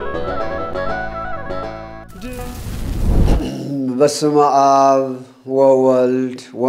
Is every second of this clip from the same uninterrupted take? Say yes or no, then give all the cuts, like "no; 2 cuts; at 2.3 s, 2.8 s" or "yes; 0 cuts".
no; 2 cuts; at 2.4 s, 3.7 s